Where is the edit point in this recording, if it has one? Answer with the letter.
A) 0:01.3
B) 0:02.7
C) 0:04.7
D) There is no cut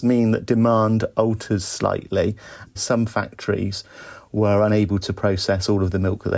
B